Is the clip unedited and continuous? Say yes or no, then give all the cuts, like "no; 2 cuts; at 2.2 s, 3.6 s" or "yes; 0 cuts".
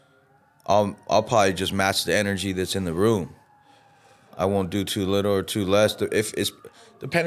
yes; 0 cuts